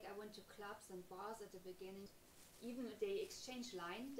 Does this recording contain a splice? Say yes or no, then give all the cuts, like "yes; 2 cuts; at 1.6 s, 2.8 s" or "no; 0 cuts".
yes; 1 cut; at 2.1 s